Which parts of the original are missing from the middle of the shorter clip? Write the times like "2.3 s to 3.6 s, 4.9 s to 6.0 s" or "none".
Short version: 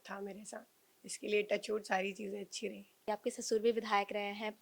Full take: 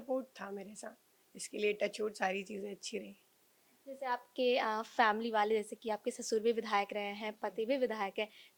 3.3 s to 5.8 s